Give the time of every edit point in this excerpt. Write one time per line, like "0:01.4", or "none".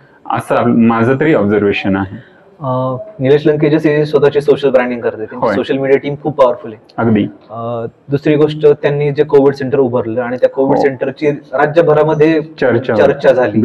none